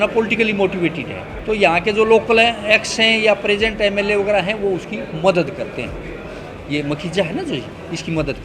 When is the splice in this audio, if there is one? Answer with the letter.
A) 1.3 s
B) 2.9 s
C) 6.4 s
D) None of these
A